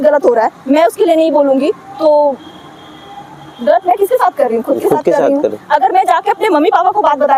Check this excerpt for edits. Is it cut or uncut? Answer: uncut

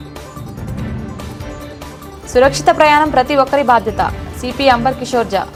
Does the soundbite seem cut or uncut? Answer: uncut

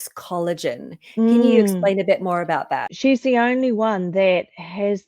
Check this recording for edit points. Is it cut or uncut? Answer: cut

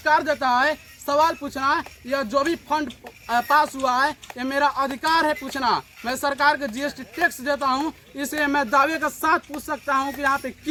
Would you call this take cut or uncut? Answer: uncut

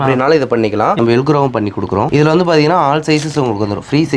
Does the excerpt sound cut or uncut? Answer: cut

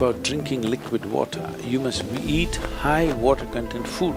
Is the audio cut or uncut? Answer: uncut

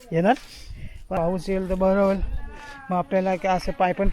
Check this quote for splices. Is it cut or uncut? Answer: cut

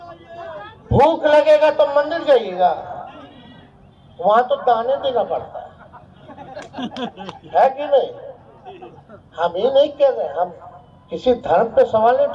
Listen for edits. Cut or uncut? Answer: uncut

